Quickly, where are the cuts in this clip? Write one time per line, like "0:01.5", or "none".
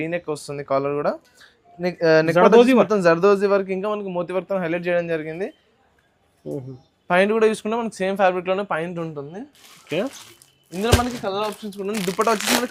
none